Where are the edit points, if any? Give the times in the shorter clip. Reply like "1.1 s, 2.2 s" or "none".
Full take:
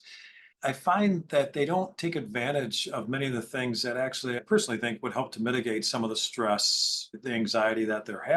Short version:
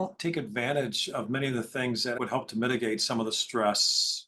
2.2 s